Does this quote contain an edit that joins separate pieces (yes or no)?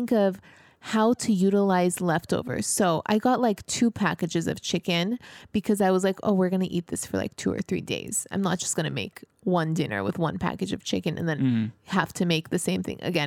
no